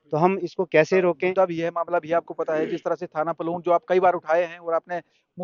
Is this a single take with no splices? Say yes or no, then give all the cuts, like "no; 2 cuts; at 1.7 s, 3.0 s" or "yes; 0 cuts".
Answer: no; 1 cut; at 1.3 s